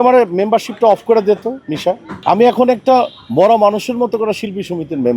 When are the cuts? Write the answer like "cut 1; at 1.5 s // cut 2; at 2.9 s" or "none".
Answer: cut 1; at 2.1 s